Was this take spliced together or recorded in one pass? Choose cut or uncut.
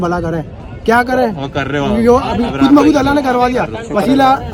uncut